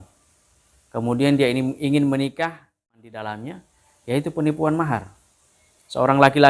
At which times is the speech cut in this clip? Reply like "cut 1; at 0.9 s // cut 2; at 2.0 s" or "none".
cut 1; at 3.0 s